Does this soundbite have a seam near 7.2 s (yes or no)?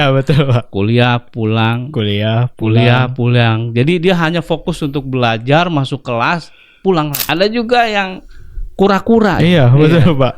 yes